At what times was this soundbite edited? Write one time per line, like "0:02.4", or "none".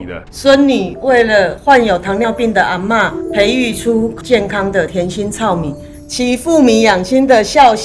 none